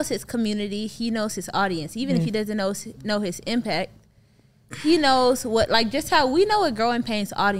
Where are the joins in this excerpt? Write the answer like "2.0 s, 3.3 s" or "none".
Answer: none